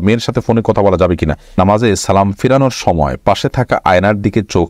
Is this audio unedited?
no; 1 cut; at 1.5 s

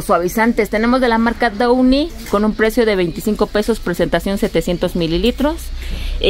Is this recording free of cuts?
yes; 0 cuts

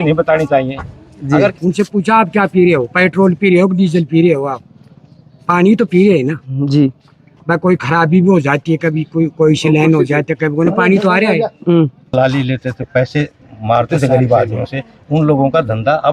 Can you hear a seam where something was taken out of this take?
yes; 2 cuts; at 1.6 s, 12.1 s

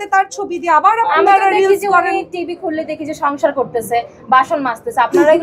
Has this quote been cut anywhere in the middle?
no; 0 cuts

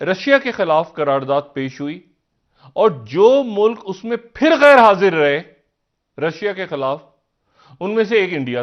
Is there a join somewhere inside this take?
no; 0 cuts

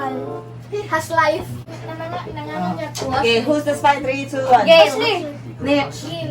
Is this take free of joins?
no; 1 cut; at 1.6 s

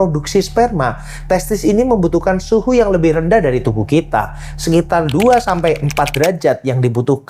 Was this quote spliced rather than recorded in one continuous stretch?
no; 0 cuts

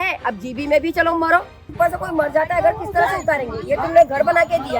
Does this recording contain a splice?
yes; 1 cut; at 1.6 s

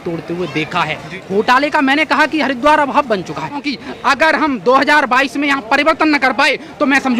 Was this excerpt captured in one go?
no; 2 cuts; at 1.2 s, 3.6 s

